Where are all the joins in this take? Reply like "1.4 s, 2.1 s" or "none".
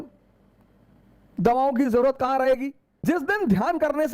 2.9 s